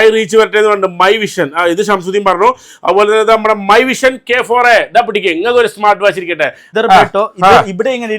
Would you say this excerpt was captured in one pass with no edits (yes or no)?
no